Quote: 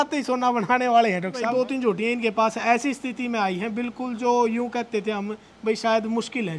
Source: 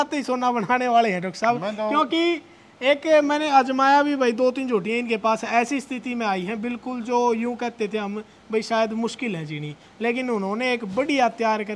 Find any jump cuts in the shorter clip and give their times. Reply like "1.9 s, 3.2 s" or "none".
1.5 s